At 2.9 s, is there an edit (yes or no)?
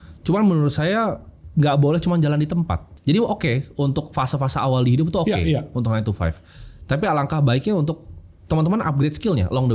yes